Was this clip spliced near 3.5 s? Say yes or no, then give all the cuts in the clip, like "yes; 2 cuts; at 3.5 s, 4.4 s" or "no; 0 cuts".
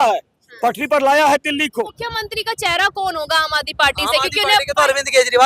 no; 1 cut; at 2.0 s